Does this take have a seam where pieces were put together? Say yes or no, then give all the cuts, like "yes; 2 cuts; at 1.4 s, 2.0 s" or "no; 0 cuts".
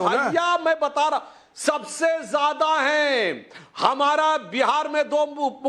no; 0 cuts